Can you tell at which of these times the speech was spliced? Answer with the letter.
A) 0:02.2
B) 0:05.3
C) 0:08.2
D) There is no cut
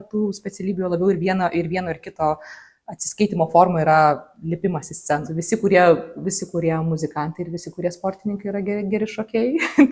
B